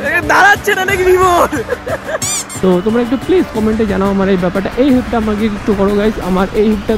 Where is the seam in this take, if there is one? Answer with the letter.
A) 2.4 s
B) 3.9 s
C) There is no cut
A